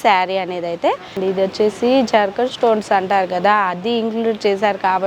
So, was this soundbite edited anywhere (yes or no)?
yes